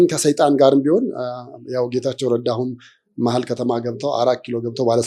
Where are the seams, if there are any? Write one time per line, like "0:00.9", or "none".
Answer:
none